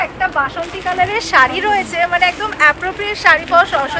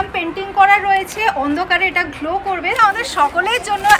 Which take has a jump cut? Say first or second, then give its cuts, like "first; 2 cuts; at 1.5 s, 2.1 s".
second; 1 cut; at 2.8 s